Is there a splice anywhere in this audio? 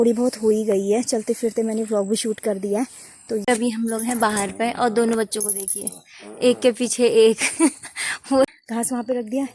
yes; 2 cuts; at 3.4 s, 8.5 s

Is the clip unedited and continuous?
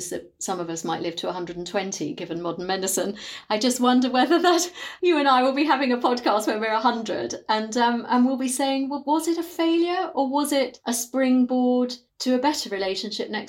no; 3 cuts; at 4.7 s, 10.8 s, 12.1 s

